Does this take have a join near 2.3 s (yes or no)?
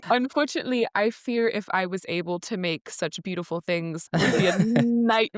no